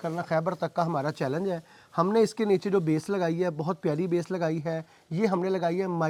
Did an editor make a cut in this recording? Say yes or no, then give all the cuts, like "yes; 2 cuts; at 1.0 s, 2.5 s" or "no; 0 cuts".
no; 0 cuts